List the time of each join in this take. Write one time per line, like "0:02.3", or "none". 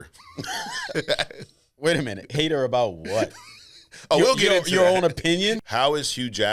0:05.6